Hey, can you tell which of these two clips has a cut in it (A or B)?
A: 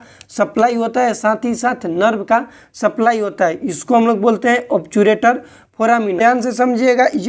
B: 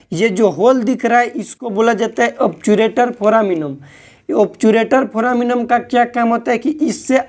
A